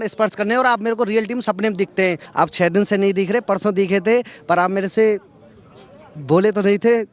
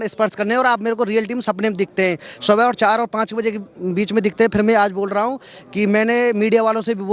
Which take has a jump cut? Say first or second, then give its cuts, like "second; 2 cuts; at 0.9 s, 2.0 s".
first; 1 cut; at 2.2 s